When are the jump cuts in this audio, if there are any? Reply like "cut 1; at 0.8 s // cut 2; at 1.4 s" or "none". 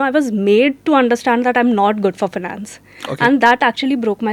none